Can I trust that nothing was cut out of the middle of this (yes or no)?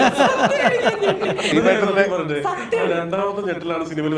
no